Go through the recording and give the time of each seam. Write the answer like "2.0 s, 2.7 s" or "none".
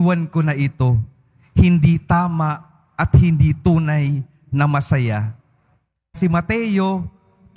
6.1 s